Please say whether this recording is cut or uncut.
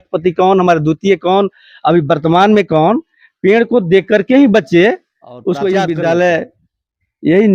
cut